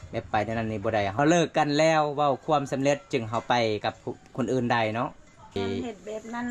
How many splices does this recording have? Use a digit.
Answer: 2